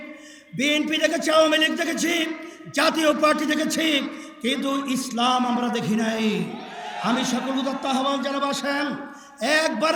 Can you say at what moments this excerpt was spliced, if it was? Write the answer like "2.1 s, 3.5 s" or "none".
none